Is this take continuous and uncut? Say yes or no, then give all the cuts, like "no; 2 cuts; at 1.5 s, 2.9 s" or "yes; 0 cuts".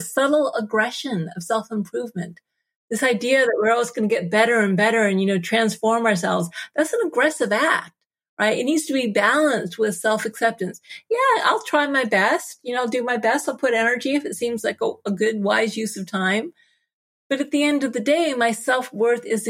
yes; 0 cuts